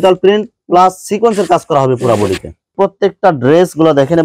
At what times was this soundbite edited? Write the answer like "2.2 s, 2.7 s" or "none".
2.7 s